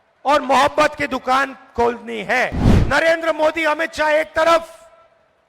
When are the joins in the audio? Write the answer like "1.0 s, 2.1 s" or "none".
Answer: 2.7 s